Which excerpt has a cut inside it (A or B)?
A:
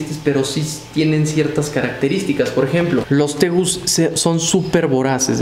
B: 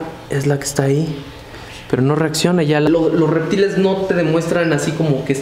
B